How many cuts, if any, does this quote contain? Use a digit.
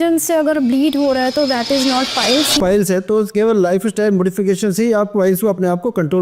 1